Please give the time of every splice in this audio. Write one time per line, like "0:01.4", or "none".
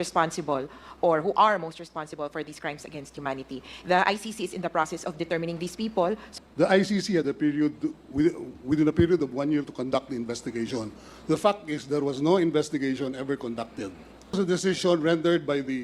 0:06.3
0:14.4

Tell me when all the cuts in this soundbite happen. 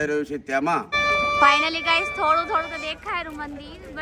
0:00.9

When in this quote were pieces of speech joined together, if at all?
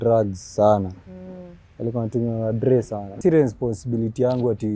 0:03.2

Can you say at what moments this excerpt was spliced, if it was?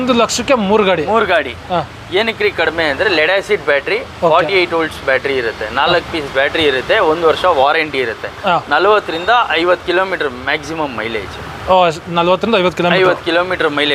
none

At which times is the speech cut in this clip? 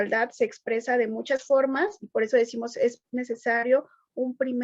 0:02.0

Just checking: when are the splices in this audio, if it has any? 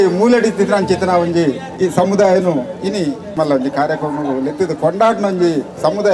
0:01.7
0:03.3

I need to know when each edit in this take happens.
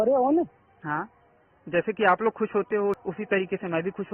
0:03.0

